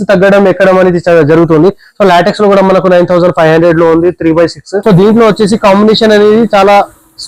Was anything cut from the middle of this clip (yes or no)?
yes